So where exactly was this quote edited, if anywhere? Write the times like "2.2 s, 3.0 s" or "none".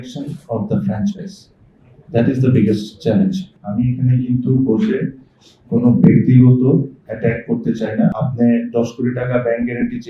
3.5 s, 8.2 s